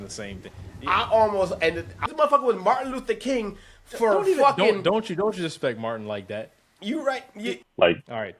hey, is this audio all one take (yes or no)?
no